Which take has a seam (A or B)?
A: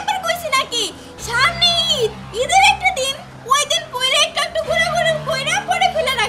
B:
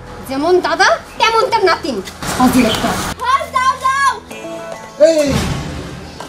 B